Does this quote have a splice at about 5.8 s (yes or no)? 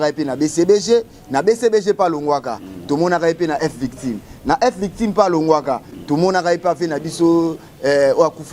no